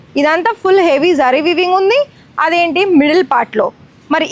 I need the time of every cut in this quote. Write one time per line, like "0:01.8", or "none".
none